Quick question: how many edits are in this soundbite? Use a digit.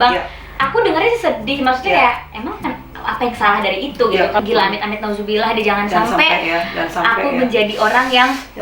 1